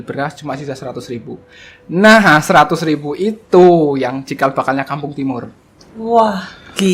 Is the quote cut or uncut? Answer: uncut